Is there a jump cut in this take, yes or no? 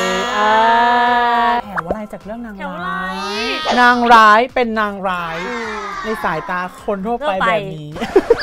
yes